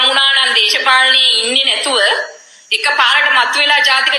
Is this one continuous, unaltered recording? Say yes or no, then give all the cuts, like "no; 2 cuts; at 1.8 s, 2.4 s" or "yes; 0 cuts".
yes; 0 cuts